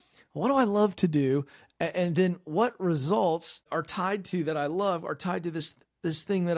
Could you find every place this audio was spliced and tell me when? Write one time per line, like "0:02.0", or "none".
0:03.6

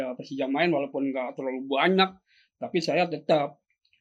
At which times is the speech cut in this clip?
none

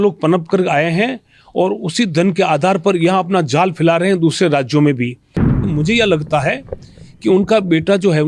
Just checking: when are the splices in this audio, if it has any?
0:05.6

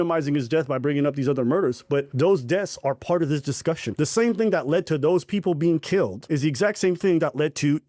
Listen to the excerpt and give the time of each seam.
0:02.1
0:03.9
0:06.2

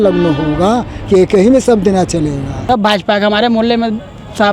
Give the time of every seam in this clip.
0:02.6

